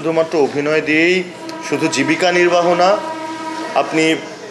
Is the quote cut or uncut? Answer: uncut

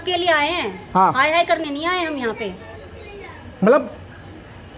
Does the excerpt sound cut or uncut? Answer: uncut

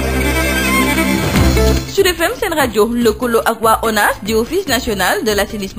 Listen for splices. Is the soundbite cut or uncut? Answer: cut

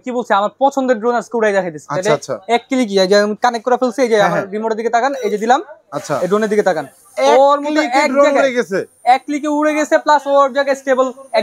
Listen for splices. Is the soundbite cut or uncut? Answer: uncut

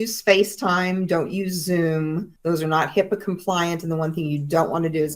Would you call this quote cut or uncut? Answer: cut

